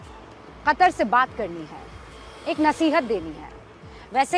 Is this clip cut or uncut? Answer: uncut